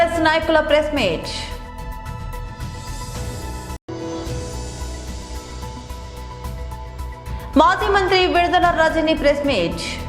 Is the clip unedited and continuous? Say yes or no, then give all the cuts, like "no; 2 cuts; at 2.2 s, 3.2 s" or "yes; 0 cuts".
yes; 0 cuts